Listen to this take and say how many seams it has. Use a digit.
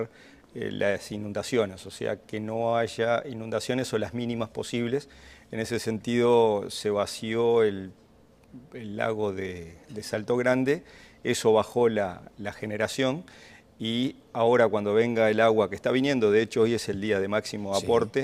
1